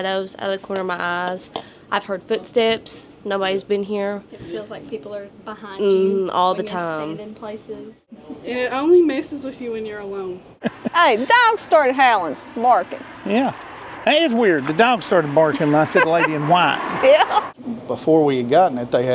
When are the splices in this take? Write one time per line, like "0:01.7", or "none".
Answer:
0:08.2
0:10.6
0:17.5